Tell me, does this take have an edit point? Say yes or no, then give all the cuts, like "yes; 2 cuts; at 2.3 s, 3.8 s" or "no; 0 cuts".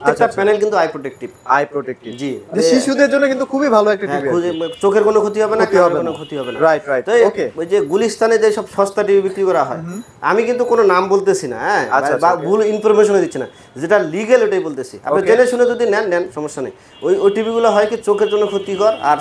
no; 0 cuts